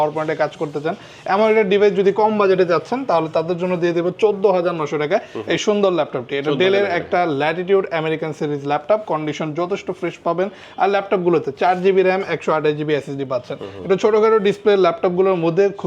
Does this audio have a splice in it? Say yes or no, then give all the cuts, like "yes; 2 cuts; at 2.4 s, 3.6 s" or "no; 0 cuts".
no; 0 cuts